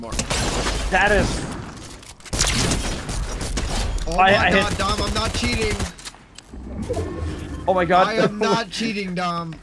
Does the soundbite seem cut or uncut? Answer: uncut